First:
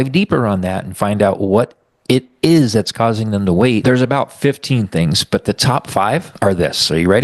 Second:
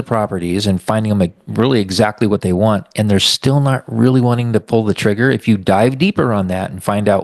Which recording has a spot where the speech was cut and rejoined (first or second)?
first